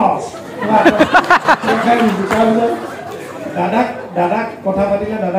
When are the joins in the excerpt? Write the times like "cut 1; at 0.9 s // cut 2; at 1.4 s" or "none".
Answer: none